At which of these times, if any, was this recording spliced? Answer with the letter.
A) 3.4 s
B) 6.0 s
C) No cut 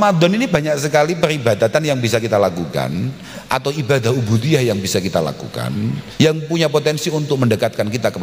B